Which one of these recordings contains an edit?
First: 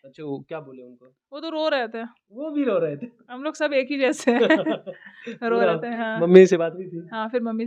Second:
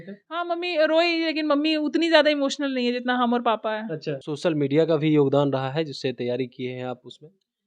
second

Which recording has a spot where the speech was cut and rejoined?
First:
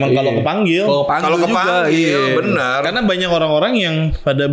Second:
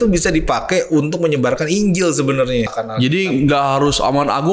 second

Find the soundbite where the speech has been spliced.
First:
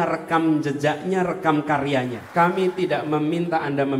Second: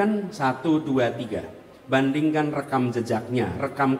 first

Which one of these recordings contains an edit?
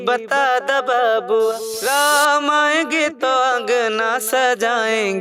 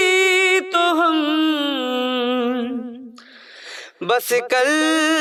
first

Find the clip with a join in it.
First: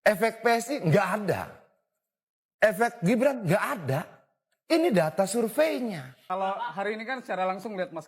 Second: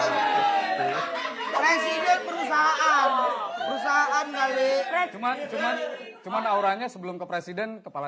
first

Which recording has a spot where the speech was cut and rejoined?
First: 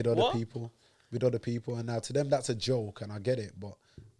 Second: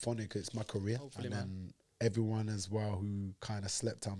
second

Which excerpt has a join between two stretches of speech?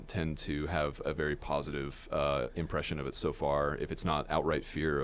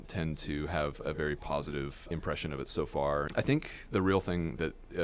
second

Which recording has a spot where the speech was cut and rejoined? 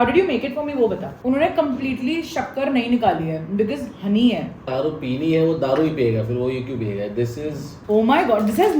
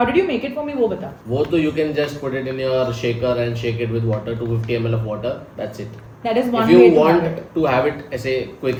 first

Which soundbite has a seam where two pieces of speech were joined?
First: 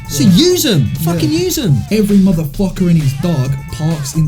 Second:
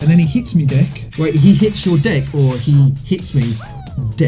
first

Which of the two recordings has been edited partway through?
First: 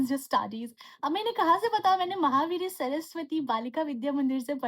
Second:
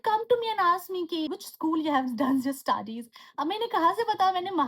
second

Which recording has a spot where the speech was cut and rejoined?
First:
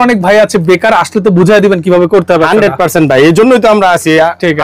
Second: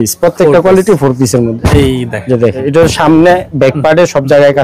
second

